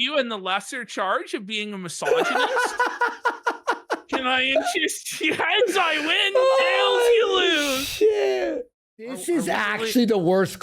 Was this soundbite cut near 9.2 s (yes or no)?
yes